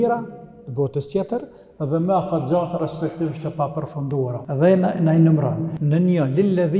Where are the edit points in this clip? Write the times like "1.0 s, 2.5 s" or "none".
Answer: 4.4 s, 5.7 s